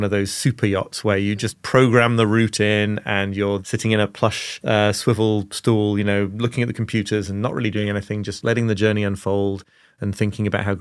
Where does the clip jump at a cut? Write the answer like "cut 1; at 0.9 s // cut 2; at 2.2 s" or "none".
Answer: cut 1; at 3.6 s // cut 2; at 4.6 s // cut 3; at 8.4 s